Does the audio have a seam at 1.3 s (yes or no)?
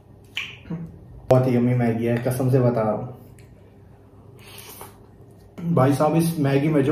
yes